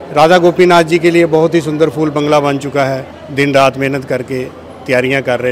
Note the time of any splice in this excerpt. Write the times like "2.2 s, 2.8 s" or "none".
3.2 s

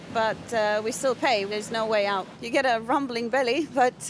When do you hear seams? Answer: 1.5 s, 2.3 s

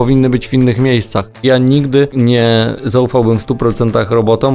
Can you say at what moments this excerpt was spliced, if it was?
1.4 s, 2.1 s

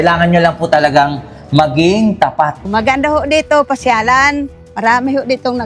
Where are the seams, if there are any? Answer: 2.7 s

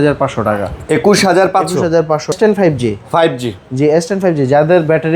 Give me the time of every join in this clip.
2.3 s

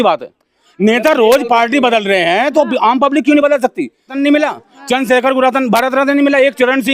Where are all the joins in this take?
4.2 s

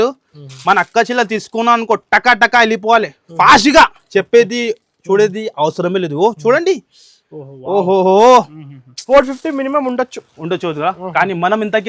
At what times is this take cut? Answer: 9.0 s

